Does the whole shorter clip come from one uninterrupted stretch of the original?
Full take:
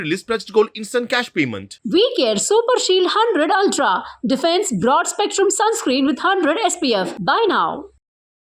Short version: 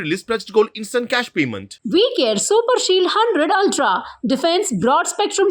yes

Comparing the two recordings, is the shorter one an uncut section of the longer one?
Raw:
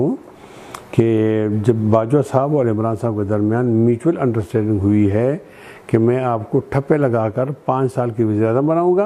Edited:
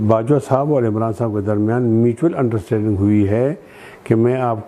yes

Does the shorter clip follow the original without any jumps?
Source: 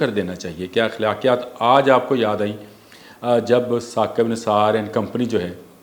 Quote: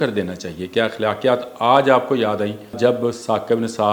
no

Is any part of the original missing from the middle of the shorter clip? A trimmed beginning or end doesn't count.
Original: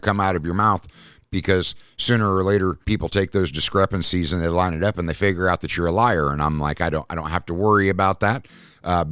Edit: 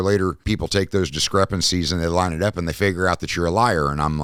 no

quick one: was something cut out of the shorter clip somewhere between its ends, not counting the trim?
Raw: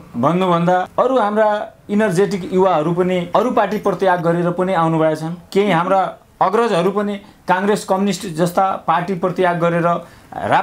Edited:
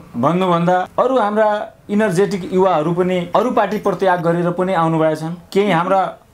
no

